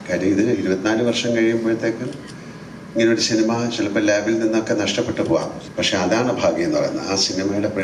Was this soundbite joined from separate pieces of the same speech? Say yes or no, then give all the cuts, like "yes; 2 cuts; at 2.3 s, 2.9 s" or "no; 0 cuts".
yes; 1 cut; at 5.6 s